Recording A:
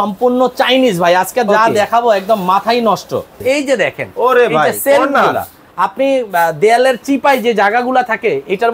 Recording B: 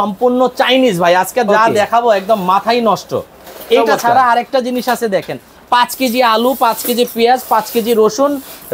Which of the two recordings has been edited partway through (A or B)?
A